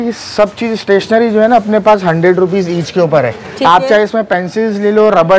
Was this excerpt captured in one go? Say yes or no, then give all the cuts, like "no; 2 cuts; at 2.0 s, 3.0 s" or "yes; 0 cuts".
yes; 0 cuts